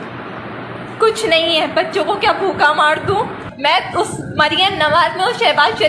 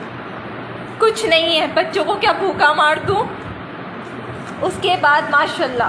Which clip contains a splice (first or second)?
first